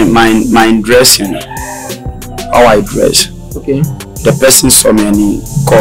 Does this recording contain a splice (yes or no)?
no